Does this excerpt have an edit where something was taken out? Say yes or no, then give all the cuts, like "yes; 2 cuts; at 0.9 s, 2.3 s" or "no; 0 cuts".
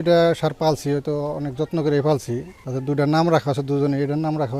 no; 0 cuts